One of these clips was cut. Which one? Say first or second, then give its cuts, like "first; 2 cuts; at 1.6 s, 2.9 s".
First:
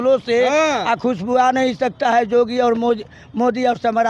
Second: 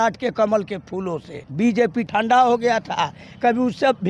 second; 1 cut; at 1.8 s